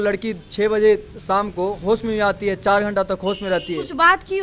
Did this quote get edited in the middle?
no; 0 cuts

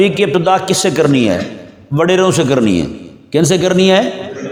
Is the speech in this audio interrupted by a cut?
no; 0 cuts

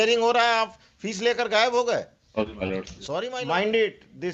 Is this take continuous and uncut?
no; 1 cut; at 3.0 s

